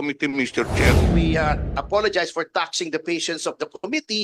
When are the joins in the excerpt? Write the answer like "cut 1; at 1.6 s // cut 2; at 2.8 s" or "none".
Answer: cut 1; at 1.1 s